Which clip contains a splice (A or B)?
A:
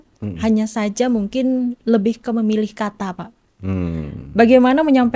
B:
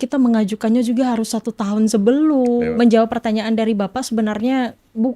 B